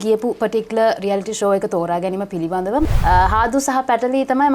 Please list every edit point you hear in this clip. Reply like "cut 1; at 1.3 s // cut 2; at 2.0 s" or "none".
cut 1; at 2.9 s